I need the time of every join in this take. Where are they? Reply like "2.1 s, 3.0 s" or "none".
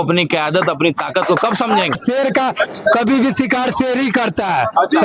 2.0 s